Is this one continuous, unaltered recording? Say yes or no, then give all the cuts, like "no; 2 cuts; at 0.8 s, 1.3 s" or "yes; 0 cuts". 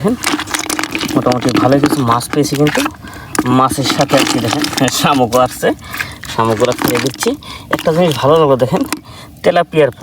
yes; 0 cuts